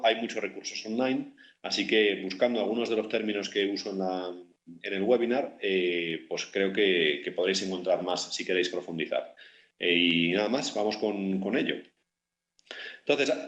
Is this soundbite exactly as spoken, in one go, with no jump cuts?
yes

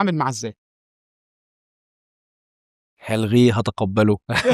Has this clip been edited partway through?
no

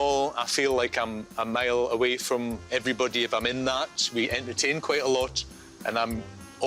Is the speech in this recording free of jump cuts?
yes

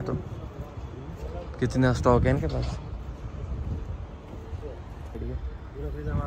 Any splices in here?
yes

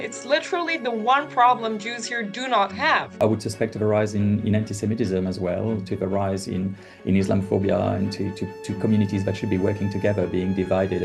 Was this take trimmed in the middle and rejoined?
yes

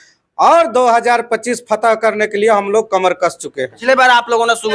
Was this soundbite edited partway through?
yes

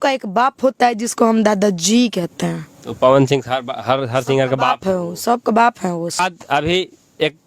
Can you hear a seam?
yes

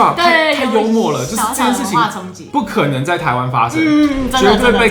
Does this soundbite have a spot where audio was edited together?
no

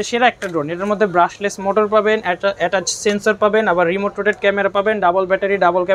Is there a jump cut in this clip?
no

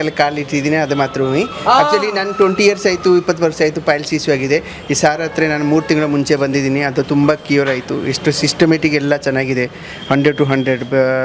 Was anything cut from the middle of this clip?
no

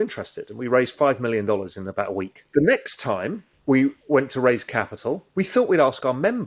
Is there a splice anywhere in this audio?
yes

